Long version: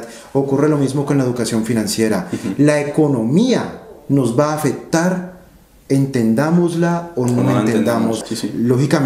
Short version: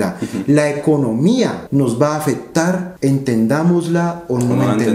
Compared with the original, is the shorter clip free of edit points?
no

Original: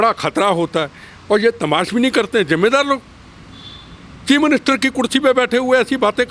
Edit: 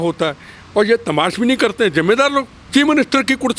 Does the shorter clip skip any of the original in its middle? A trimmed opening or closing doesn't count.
yes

